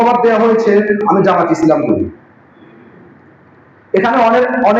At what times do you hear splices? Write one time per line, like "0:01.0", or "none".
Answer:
none